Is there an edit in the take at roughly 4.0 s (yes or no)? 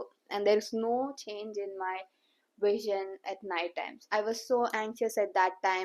yes